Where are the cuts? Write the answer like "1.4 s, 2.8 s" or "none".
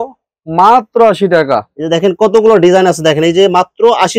none